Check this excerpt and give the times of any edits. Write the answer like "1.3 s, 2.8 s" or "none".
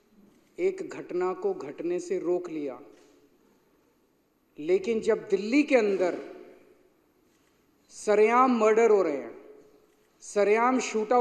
none